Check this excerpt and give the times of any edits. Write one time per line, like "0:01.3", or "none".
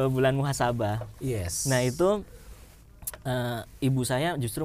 none